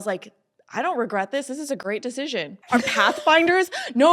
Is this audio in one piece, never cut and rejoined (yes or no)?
no